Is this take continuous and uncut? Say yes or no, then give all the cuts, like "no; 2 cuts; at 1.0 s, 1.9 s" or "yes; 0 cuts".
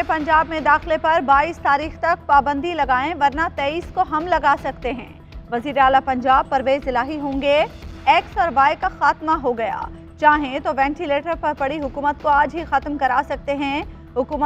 yes; 0 cuts